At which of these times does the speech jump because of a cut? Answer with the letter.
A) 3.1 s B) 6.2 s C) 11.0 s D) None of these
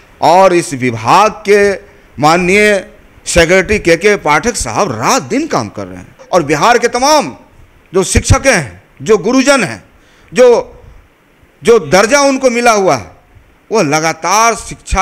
B